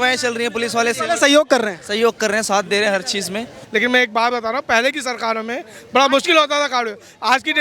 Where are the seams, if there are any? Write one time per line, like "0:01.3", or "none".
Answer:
0:03.6